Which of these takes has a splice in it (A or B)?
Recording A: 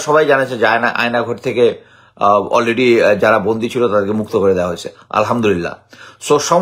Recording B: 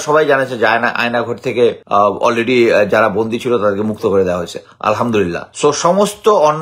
B